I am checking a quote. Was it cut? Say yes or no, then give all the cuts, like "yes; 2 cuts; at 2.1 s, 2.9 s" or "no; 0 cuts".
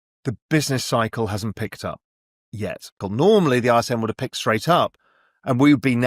yes; 1 cut; at 3.0 s